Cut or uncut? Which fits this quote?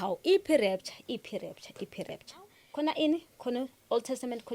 cut